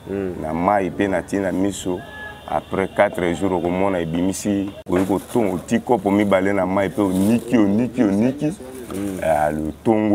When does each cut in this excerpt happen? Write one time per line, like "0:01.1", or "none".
0:04.8

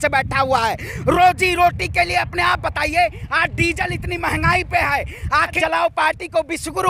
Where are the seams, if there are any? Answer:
0:05.5

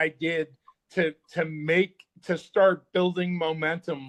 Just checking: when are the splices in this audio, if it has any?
none

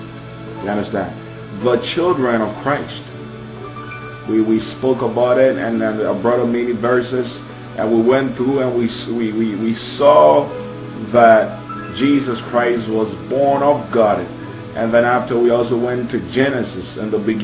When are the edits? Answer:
none

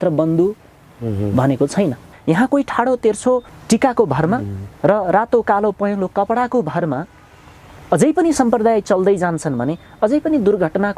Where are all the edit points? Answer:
0:02.1
0:03.5

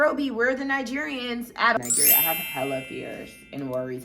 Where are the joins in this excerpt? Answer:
0:01.8

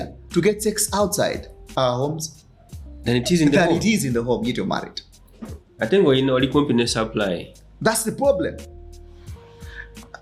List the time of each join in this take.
none

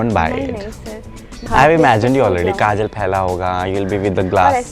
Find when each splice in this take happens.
0:01.5

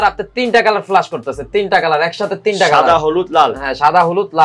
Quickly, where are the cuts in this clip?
none

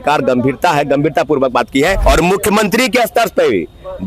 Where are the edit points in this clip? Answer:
0:02.0

